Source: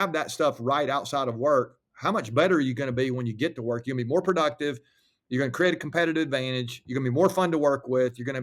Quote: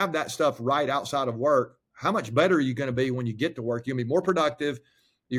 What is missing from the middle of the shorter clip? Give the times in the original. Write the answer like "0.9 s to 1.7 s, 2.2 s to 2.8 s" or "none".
none